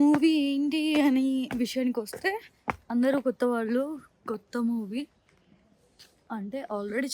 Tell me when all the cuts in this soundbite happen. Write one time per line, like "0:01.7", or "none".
none